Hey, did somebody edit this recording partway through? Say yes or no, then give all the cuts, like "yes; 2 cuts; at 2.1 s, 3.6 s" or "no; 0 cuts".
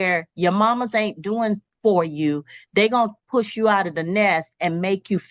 no; 0 cuts